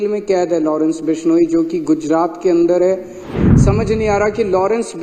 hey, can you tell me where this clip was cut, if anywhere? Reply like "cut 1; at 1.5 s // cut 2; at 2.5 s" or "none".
cut 1; at 3.4 s